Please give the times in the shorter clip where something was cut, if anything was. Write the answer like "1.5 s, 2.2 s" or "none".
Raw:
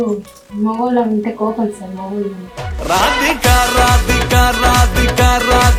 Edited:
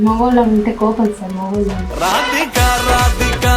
1.9 s